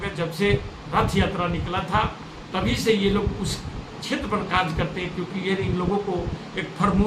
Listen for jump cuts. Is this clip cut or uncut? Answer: uncut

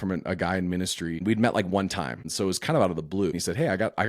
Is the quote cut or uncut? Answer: cut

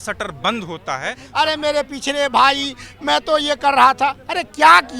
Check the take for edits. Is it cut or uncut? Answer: cut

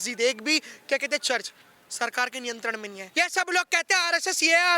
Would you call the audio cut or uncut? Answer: cut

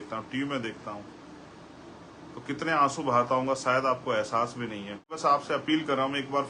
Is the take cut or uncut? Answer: cut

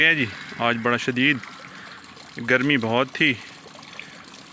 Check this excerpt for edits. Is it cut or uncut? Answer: uncut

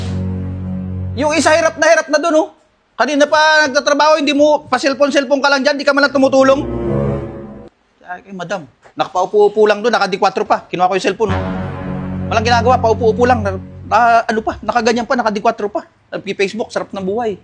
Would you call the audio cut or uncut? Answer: cut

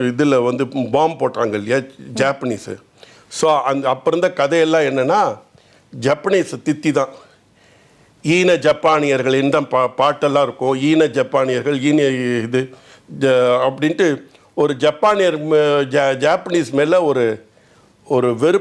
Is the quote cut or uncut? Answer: uncut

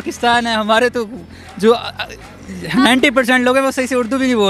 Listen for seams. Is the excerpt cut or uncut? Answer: uncut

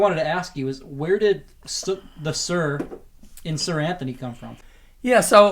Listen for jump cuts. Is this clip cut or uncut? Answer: uncut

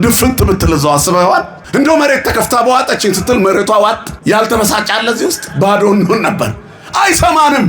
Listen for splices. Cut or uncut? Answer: cut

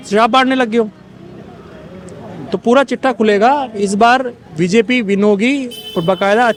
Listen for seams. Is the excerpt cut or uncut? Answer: uncut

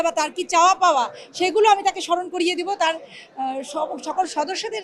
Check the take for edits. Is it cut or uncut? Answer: uncut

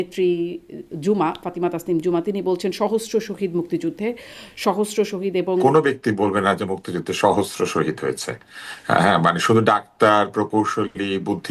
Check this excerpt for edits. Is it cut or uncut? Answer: cut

